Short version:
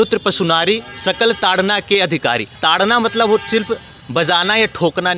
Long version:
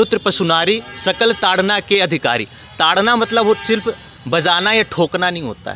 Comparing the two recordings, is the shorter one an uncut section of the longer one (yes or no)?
no